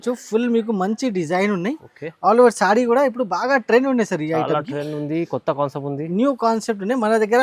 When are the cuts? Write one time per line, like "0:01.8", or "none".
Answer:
none